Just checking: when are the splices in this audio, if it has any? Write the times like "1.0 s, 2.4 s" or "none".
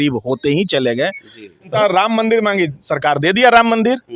1.7 s